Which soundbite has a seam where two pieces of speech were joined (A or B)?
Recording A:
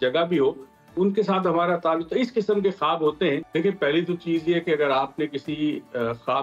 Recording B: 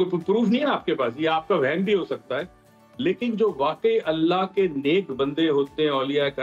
A